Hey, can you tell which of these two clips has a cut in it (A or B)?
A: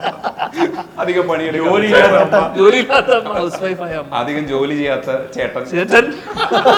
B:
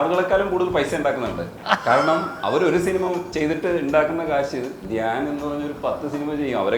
B